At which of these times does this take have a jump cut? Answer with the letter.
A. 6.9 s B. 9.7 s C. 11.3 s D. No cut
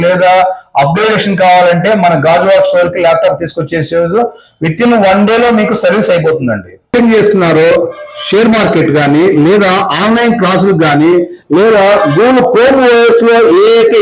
A